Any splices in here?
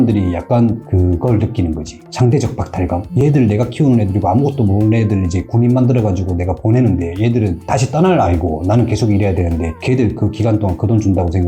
no; 0 cuts

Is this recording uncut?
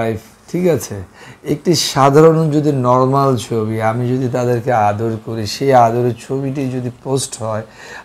yes; 0 cuts

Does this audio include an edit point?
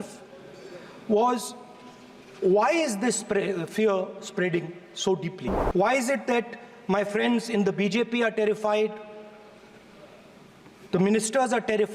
yes; 1 cut; at 5.5 s

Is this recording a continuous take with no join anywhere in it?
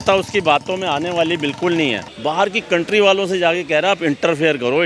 no; 1 cut; at 2.1 s

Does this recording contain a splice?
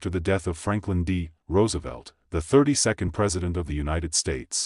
yes; 1 cut; at 3.8 s

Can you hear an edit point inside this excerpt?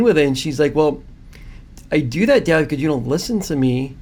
no; 0 cuts

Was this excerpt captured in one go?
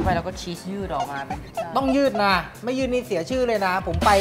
yes; 0 cuts

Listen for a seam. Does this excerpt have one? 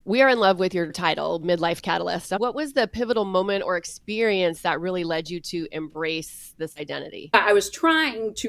yes; 3 cuts; at 1.0 s, 2.4 s, 7.3 s

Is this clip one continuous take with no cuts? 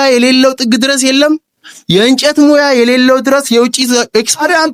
yes; 0 cuts

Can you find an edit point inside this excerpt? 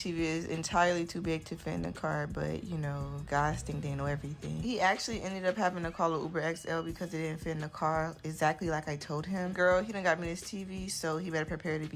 yes; 1 cut; at 5.4 s

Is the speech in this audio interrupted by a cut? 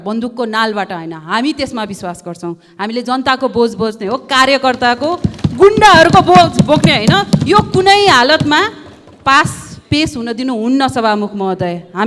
no; 0 cuts

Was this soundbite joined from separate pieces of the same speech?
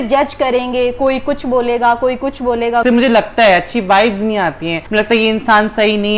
yes; 1 cut; at 2.8 s

